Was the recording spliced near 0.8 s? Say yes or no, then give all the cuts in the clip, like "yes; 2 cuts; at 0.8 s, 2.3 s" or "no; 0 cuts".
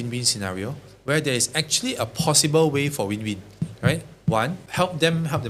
no; 0 cuts